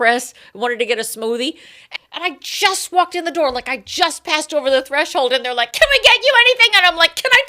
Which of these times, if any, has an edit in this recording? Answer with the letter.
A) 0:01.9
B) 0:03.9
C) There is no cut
A